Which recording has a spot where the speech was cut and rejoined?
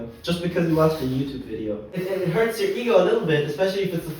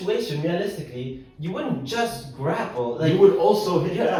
first; 1 cut; at 1.9 s

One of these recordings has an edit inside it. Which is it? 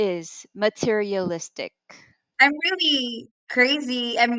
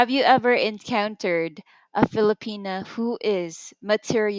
first; 1 cut; at 2.2 s

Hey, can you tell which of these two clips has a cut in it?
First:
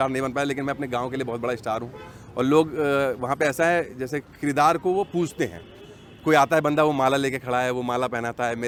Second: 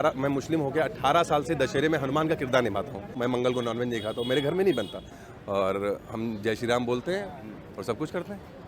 second; 2 cuts; at 3.1 s, 5.1 s

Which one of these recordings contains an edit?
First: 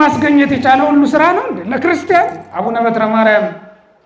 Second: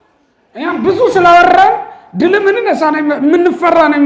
first; 1 cut; at 2.4 s

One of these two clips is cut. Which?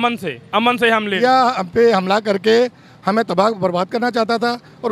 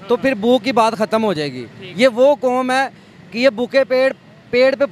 first; 1 cut; at 1.1 s

